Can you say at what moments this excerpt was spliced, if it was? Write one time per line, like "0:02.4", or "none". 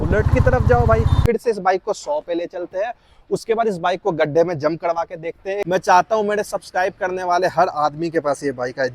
0:01.2
0:05.6